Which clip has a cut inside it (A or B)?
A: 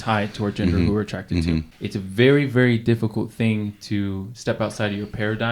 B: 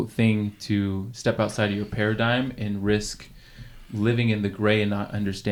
A